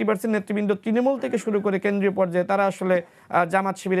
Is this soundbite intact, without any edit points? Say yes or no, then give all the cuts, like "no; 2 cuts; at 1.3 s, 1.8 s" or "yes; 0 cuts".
yes; 0 cuts